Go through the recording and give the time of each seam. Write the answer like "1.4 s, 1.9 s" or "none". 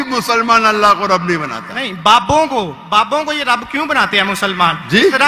none